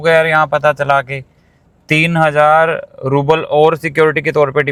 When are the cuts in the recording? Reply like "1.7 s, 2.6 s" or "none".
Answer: none